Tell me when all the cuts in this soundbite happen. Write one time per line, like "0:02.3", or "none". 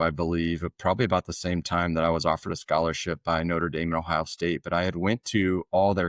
none